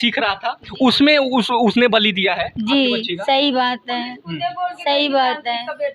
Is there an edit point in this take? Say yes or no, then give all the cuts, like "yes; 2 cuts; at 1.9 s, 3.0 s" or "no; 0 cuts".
no; 0 cuts